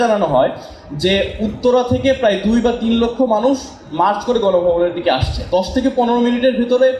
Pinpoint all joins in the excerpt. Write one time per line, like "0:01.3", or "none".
0:05.4